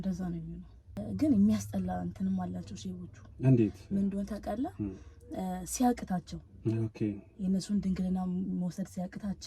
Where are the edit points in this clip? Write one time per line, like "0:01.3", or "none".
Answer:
0:01.0